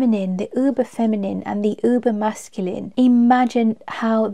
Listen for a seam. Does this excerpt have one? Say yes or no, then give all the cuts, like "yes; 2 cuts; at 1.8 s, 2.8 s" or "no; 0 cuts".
yes; 1 cut; at 2.9 s